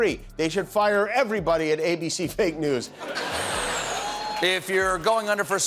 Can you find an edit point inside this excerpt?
yes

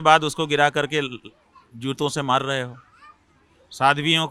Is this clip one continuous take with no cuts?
yes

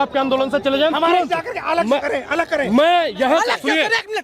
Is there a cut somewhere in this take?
no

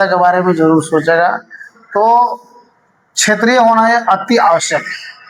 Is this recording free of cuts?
yes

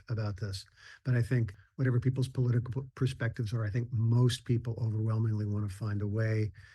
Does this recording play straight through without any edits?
no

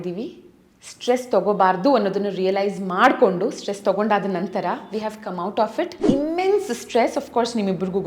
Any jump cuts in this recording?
yes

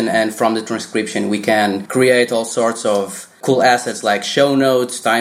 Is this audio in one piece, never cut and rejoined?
no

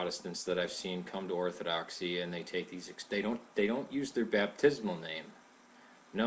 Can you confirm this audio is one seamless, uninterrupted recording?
no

